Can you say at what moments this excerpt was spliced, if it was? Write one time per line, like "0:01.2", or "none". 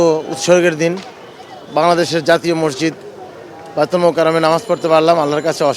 none